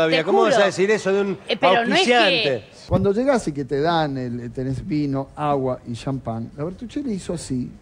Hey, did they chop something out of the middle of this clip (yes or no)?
yes